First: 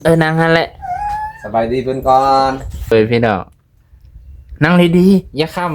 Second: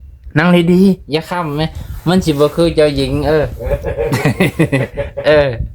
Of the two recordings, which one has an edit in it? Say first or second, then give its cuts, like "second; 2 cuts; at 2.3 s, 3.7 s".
first; 1 cut; at 2.9 s